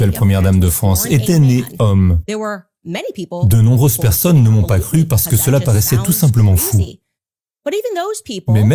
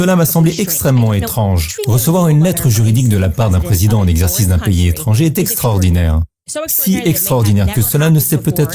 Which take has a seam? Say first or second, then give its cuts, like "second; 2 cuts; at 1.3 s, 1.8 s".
second; 1 cut; at 1.7 s